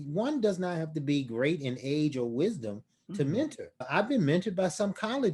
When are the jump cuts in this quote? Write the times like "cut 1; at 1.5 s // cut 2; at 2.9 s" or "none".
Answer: cut 1; at 3.9 s